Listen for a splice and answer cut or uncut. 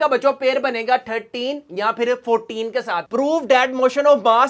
cut